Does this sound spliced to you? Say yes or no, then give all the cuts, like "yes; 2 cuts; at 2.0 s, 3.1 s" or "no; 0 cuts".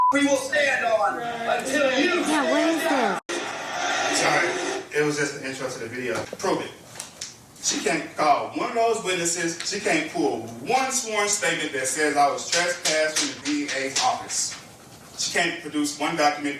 yes; 3 cuts; at 3.2 s, 6.3 s, 13.4 s